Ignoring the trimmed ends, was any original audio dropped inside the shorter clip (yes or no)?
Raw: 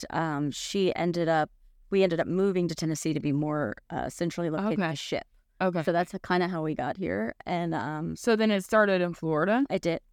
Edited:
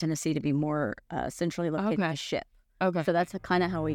no